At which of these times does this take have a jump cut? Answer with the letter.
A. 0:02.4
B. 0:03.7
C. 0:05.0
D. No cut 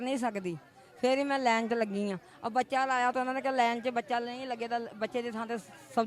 D